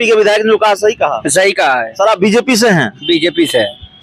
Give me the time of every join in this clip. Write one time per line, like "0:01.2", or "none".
none

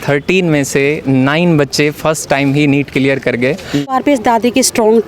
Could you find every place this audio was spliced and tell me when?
0:03.9

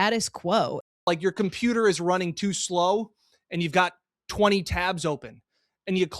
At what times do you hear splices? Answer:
0:00.9

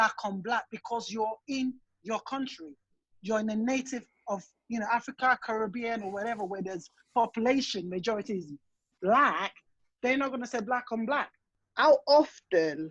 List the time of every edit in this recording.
0:11.5

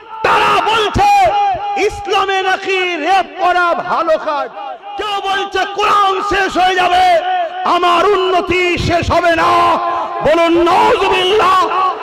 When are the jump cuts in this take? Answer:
0:04.9

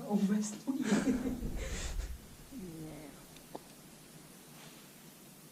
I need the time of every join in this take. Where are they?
none

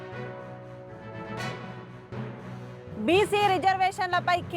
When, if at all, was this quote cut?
0:01.3

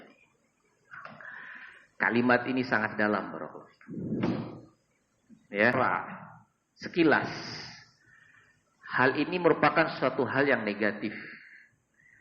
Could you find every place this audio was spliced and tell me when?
0:05.7

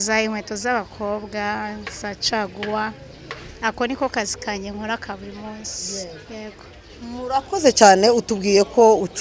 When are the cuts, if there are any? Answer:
none

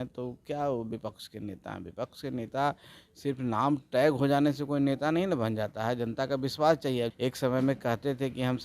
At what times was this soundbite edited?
0:07.1

